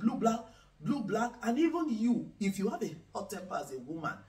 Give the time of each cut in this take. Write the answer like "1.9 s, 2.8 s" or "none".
none